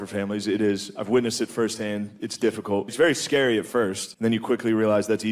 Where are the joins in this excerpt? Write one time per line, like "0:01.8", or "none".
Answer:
0:02.9
0:04.0